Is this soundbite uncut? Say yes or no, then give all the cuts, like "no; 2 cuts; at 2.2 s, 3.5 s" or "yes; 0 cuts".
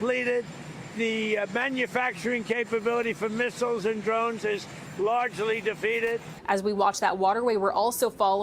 no; 1 cut; at 6.3 s